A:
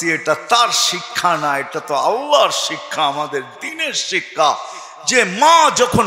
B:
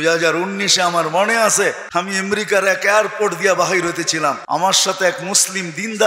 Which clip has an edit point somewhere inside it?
B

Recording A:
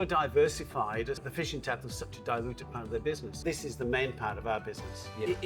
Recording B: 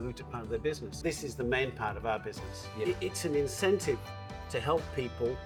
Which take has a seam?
A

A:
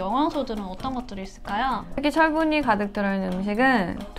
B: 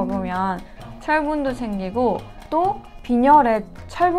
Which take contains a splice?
A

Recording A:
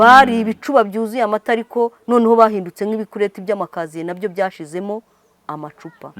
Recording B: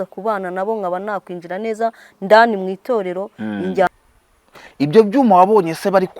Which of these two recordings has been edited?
B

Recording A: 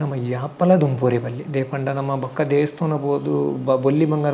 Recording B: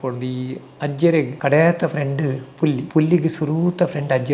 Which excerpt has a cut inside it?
B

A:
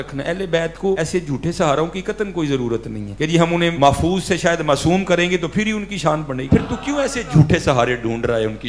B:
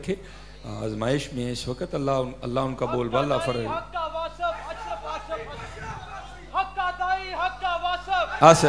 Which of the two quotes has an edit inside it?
A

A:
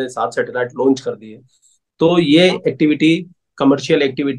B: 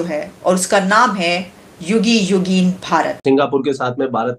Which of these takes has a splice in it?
B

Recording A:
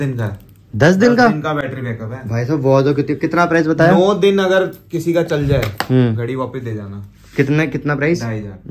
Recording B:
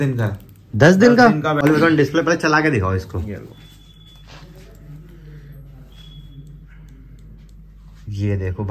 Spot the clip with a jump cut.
B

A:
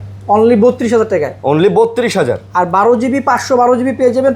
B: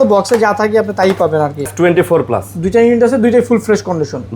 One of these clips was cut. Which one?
B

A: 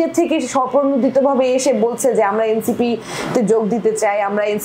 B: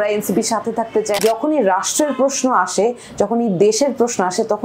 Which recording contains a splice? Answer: B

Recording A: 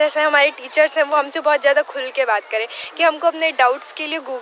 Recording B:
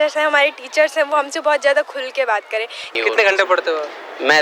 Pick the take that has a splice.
B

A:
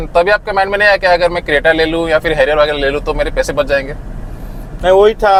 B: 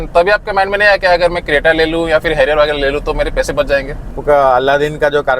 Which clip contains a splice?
B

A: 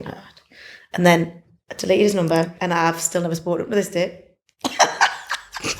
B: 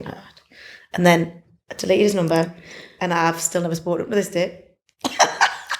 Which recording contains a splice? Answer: A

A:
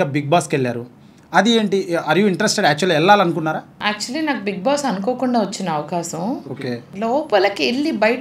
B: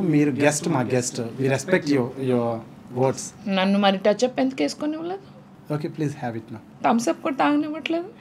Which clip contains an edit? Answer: A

